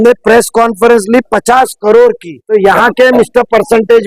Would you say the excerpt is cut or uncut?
cut